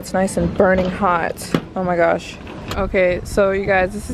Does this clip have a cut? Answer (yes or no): yes